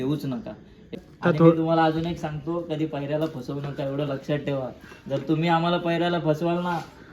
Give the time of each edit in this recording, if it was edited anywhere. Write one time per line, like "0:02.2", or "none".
0:01.0